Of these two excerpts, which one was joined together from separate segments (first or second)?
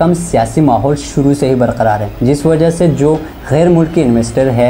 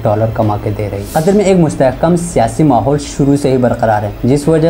second